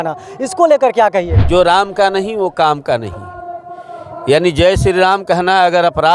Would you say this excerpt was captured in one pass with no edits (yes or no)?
no